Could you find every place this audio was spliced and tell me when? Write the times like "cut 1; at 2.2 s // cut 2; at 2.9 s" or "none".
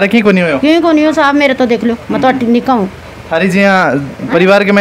none